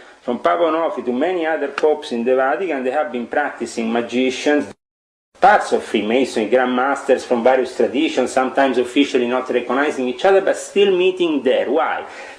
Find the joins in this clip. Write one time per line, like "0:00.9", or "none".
0:04.7